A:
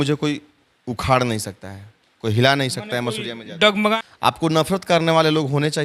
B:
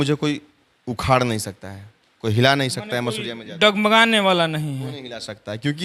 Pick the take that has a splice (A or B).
A